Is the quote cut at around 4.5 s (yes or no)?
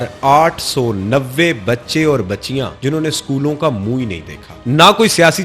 yes